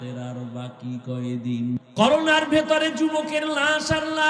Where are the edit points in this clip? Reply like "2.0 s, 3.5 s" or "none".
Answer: 1.8 s